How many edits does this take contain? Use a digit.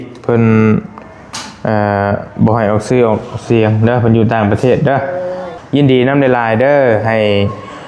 1